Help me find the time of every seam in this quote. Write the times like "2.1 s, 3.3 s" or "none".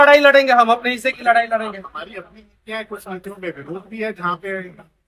none